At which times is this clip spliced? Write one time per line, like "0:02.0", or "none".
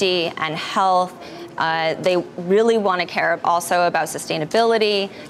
none